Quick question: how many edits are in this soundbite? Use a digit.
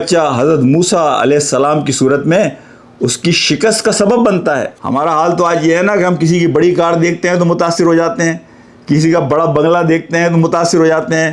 1